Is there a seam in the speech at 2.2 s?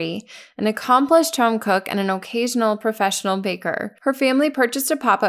no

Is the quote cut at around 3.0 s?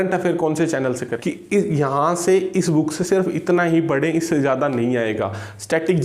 no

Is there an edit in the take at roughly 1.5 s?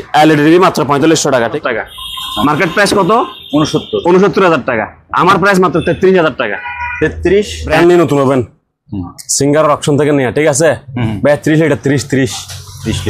yes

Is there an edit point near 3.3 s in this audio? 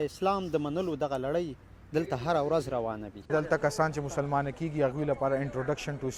yes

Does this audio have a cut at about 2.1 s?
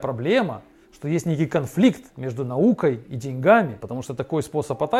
no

